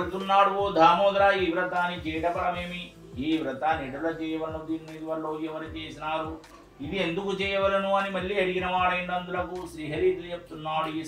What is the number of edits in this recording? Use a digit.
0